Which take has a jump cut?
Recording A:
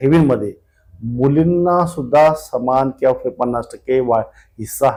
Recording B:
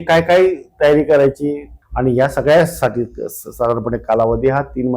B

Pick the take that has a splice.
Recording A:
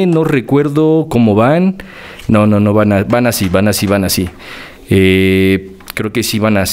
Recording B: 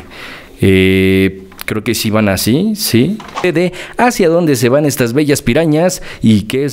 B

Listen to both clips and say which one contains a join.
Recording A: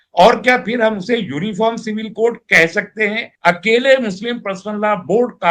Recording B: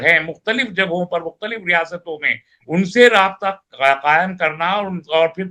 A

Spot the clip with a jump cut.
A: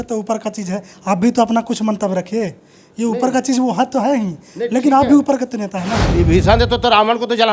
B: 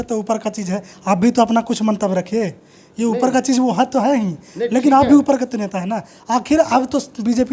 A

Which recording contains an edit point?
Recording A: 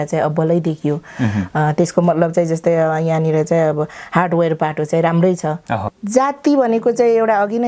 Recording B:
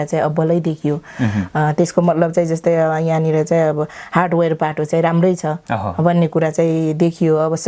A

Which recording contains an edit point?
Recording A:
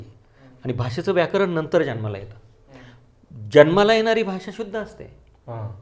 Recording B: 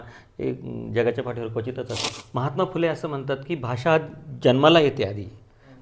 B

